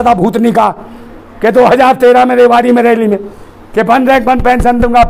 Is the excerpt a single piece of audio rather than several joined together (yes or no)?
yes